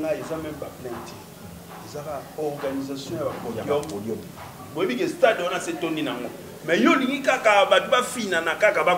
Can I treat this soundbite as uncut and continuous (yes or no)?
no